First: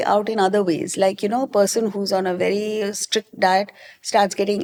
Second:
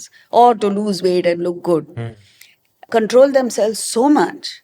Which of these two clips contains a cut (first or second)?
second